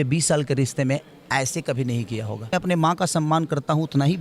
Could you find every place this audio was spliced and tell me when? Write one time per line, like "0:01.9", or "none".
0:02.5